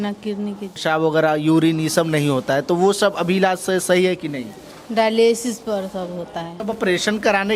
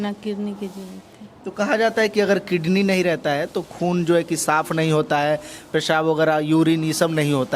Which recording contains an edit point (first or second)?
first